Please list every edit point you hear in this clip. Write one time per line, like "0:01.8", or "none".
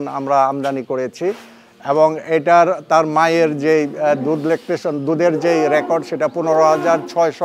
none